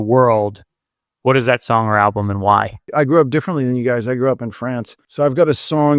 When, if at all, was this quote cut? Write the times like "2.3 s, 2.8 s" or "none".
2.9 s, 5.0 s